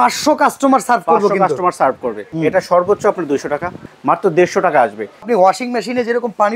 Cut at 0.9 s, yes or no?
no